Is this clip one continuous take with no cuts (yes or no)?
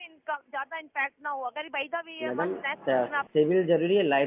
no